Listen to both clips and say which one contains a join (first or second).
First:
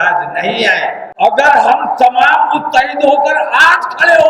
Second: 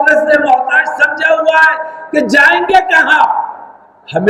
first